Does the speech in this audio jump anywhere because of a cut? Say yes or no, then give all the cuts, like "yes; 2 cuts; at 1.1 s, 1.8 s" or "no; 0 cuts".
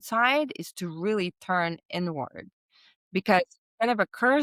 no; 0 cuts